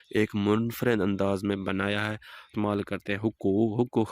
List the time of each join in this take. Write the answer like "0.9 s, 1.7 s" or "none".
2.5 s